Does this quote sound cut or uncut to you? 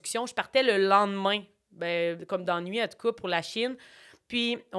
uncut